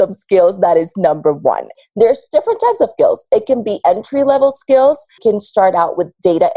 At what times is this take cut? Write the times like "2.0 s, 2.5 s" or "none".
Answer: 1.7 s, 5.1 s